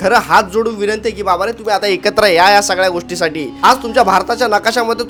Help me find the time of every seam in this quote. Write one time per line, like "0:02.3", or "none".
none